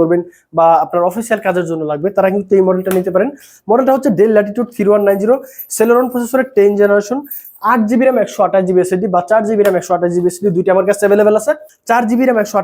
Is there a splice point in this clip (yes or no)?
no